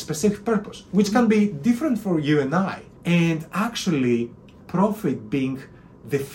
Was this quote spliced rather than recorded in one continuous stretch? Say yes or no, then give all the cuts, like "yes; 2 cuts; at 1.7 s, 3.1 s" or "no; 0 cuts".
yes; 1 cut; at 2.9 s